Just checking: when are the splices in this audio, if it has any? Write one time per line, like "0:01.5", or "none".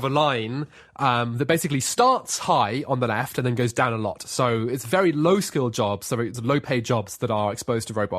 none